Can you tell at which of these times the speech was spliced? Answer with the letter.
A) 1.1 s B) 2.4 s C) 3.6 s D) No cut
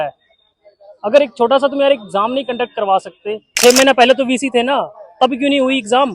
C